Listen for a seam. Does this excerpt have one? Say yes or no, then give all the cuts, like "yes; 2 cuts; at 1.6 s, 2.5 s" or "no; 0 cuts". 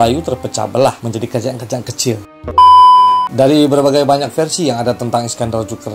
yes; 2 cuts; at 2.3 s, 3.3 s